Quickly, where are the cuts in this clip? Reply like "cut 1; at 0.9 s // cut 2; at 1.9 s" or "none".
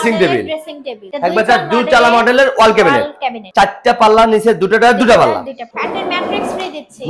cut 1; at 1.0 s // cut 2; at 5.7 s